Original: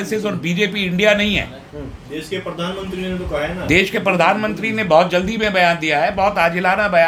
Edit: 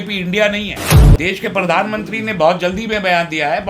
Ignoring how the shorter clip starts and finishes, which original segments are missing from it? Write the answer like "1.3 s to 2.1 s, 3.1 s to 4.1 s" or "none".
1.8 s to 3.6 s